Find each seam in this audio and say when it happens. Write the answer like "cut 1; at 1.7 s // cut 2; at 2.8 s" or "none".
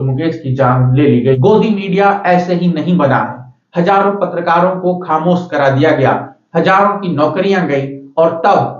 cut 1; at 1.4 s